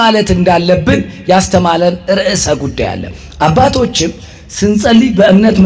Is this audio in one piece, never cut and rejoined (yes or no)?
yes